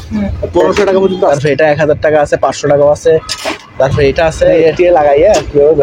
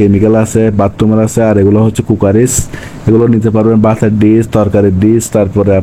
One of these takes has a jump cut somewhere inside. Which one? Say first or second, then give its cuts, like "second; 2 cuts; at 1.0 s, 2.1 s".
first; 2 cuts; at 1.3 s, 4.6 s